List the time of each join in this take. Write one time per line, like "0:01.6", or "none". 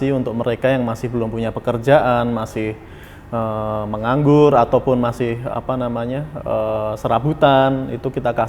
none